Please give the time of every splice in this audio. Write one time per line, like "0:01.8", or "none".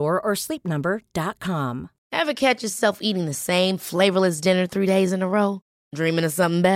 0:01.9